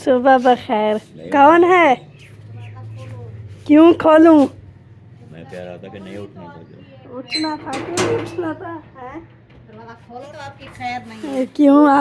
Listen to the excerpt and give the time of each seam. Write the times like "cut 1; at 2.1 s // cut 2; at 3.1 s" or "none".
cut 1; at 10.3 s